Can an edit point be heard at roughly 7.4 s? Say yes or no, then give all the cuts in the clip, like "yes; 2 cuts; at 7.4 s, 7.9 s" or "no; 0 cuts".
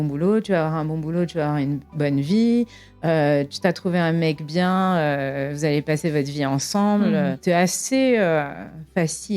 yes; 1 cut; at 7.4 s